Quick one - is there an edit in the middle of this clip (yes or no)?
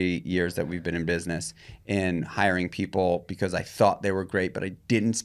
no